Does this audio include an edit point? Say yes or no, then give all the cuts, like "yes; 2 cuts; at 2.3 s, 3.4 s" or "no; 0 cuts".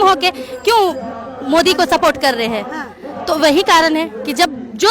no; 0 cuts